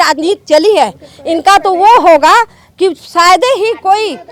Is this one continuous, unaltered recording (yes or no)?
yes